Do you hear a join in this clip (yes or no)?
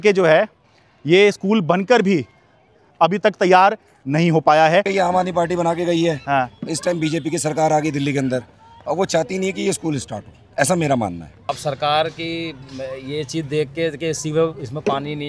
yes